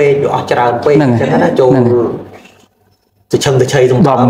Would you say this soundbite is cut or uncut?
uncut